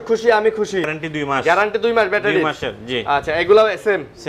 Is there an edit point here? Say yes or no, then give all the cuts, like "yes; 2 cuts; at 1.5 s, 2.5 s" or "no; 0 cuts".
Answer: yes; 1 cut; at 0.9 s